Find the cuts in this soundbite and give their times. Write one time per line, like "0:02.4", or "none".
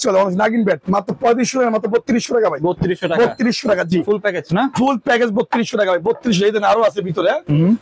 none